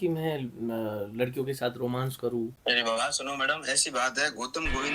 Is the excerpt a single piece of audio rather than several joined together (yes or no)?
no